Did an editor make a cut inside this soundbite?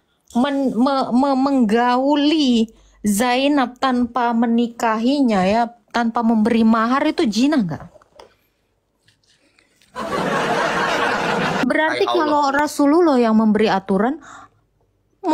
yes; 1 cut; at 11.6 s

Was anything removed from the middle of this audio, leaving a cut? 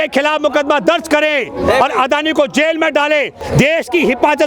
yes; 1 cut; at 3.4 s

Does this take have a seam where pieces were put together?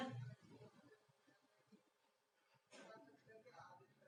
no; 0 cuts

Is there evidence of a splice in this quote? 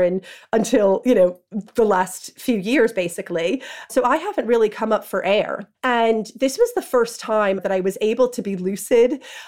yes; 3 cuts; at 3.8 s, 5.6 s, 7.6 s

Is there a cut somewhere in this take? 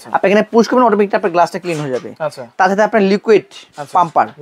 no; 0 cuts

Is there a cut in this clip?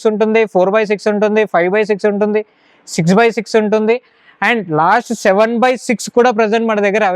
no; 0 cuts

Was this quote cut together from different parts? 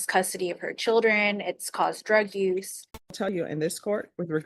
yes; 1 cut; at 3.3 s

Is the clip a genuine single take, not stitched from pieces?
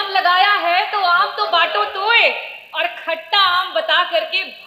yes; 0 cuts

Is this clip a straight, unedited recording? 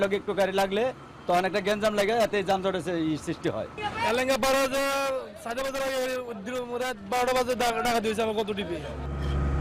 yes; 0 cuts

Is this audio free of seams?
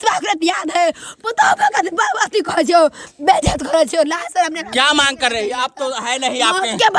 yes; 0 cuts

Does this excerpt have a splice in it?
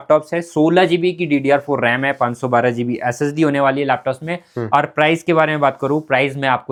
no; 0 cuts

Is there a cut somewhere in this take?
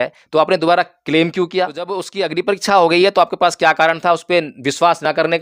yes; 1 cut; at 2.1 s

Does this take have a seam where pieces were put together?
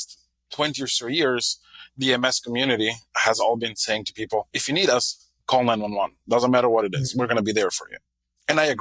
yes; 1 cut; at 4.6 s

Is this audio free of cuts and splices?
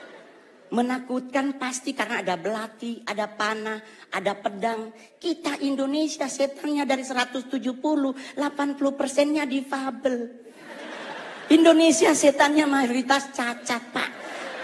yes; 0 cuts

